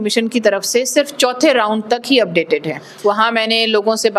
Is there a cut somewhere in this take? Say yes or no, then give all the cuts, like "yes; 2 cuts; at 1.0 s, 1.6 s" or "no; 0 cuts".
yes; 1 cut; at 2.8 s